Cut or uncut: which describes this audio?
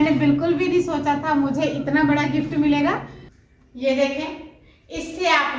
cut